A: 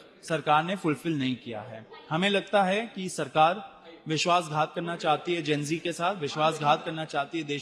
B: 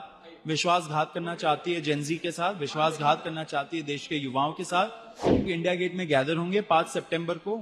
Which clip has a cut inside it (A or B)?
B